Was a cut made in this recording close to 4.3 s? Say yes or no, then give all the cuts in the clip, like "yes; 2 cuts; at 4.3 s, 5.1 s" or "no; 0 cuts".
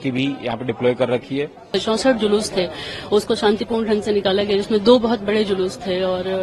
no; 1 cut; at 1.7 s